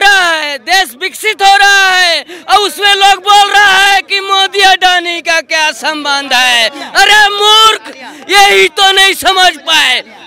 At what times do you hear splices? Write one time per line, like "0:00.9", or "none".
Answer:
none